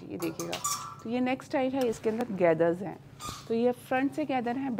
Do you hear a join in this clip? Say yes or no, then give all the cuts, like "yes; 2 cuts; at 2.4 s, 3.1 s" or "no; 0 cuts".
no; 0 cuts